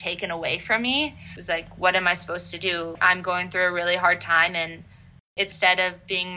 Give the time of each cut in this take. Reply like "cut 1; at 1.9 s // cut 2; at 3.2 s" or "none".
cut 1; at 1.3 s // cut 2; at 2.9 s // cut 3; at 5.3 s